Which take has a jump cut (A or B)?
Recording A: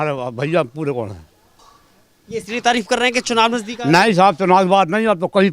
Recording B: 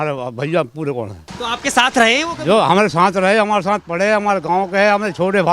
B